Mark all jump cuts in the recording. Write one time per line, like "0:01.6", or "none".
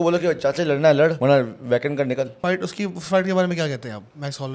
0:01.2
0:02.4